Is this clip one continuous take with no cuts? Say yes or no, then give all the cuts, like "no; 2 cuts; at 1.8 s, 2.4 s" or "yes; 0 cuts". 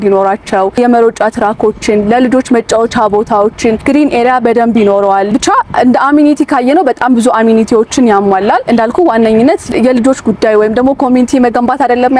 yes; 0 cuts